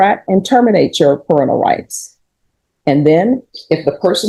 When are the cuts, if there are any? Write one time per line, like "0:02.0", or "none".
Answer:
none